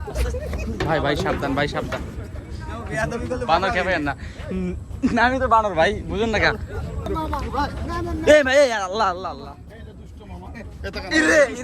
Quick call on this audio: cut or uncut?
cut